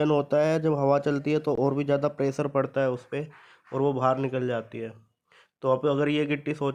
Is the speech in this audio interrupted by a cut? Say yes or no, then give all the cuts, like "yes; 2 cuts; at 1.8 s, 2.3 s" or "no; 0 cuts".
no; 0 cuts